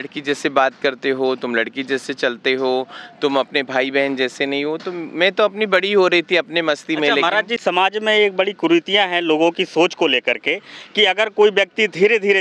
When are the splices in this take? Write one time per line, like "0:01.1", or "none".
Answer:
none